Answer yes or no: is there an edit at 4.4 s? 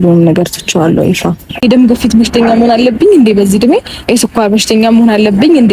no